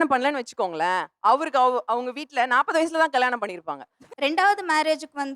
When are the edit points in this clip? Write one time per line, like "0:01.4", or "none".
0:04.0